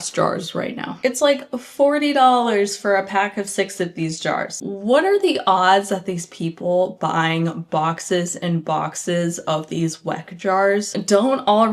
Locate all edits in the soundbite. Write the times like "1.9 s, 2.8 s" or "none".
0.9 s, 4.5 s